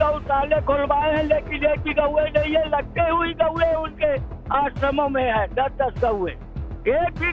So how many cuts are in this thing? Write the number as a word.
zero